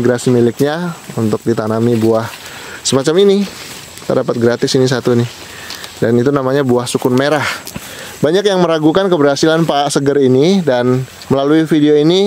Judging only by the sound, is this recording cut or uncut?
uncut